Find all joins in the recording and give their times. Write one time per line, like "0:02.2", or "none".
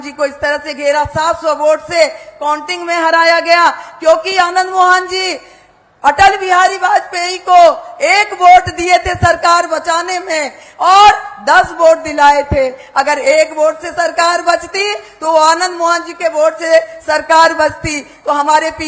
none